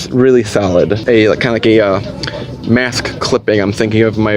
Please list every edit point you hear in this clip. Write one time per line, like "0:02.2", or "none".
0:01.0